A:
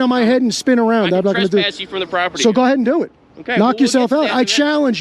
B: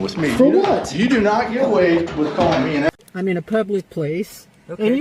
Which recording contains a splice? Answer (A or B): B